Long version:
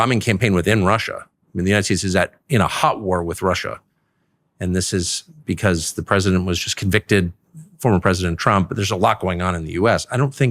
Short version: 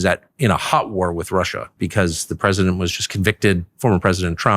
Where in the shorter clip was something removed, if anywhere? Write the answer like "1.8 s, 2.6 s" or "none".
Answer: 1.6 s, 3.7 s